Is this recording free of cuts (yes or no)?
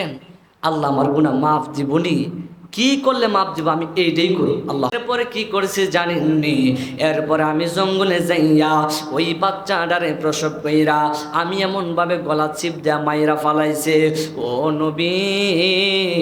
no